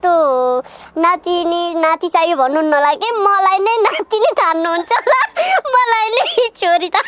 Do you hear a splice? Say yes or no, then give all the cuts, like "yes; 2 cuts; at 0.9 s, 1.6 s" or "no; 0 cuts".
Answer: no; 0 cuts